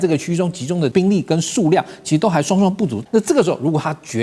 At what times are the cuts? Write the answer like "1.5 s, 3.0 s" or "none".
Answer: 0.9 s, 3.0 s